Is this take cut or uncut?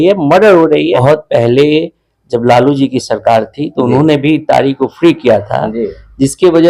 cut